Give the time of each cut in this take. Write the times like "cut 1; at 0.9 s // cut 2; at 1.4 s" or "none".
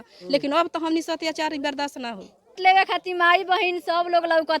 cut 1; at 2.6 s